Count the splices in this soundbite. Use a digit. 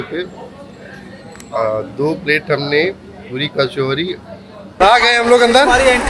1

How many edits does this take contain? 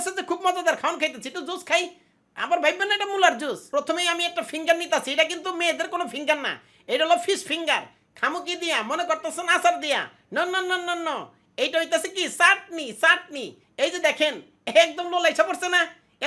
2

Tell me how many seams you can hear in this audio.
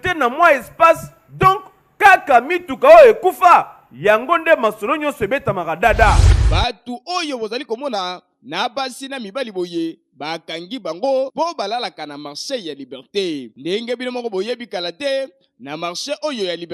1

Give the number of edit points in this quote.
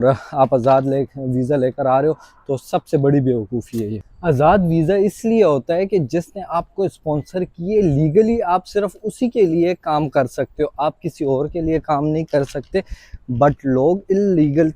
1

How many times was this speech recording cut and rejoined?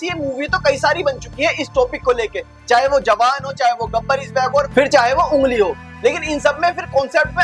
0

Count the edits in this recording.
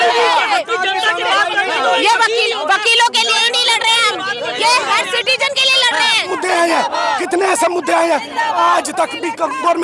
1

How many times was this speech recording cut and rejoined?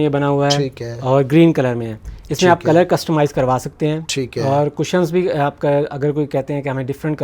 0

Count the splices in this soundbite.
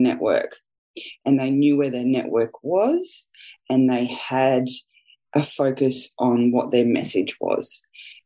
0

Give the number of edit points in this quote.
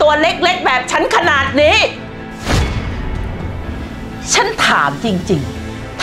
0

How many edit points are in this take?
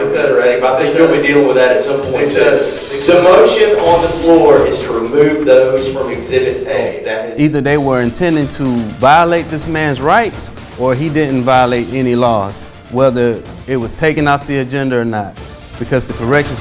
1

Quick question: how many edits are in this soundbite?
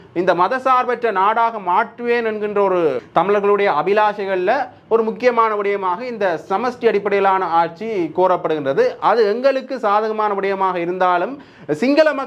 1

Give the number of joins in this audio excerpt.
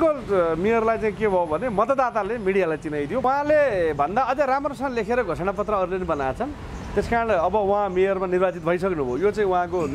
1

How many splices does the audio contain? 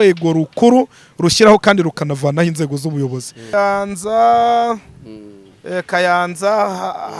1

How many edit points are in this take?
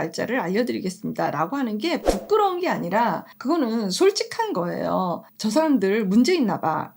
2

